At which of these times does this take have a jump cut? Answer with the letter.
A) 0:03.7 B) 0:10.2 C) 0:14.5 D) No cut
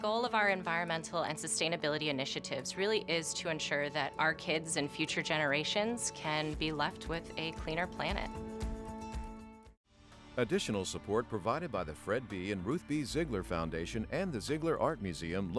B